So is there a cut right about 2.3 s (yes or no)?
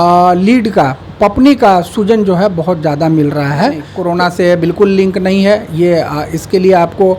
no